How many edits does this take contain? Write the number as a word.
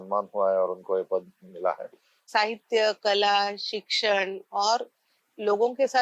one